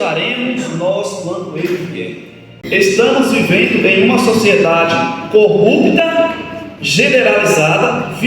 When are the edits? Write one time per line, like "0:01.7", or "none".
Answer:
0:02.5